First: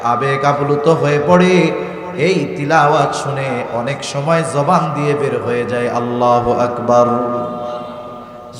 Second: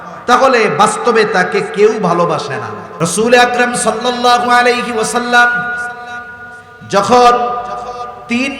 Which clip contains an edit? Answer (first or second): second